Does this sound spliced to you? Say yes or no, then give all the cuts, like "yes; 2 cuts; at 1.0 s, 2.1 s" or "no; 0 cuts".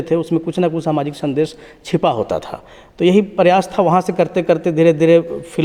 no; 0 cuts